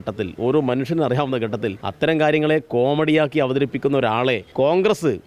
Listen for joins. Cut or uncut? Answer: cut